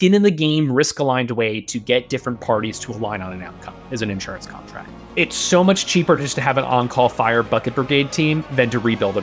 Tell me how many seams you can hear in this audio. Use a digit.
1